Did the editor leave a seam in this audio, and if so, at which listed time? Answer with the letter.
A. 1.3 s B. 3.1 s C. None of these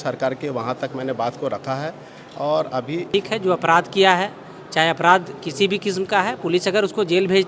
B